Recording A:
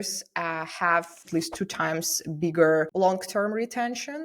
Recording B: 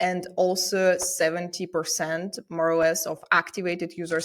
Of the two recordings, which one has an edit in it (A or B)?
A